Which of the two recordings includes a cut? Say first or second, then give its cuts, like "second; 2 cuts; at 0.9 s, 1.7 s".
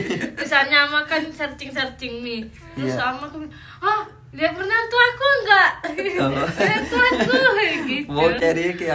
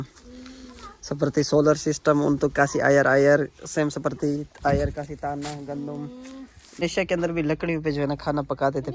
second; 1 cut; at 6.8 s